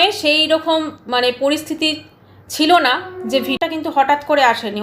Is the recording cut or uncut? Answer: cut